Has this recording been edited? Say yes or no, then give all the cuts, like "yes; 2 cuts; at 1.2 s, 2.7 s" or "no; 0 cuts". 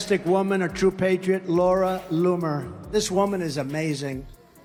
no; 0 cuts